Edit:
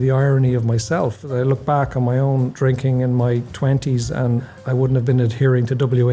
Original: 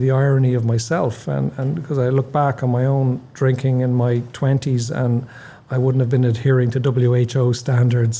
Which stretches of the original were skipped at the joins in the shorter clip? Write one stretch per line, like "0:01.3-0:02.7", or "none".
0:01.2-0:01.9
0:03.2-0:03.3
0:05.3-0:05.6